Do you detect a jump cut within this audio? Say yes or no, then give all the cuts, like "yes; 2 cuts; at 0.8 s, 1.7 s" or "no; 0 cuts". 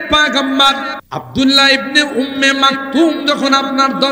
yes; 1 cut; at 1.0 s